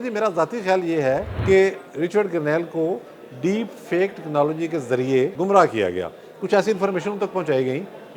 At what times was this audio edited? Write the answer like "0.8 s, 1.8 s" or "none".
1.3 s, 5.3 s